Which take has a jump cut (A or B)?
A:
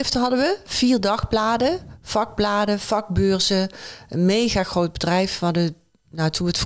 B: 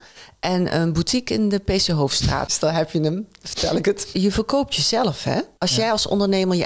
B